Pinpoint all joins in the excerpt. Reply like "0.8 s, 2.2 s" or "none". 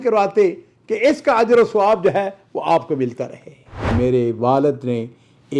3.9 s